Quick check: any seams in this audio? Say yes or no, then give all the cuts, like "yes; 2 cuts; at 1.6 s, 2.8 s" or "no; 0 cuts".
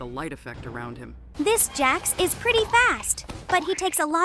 yes; 1 cut; at 1.2 s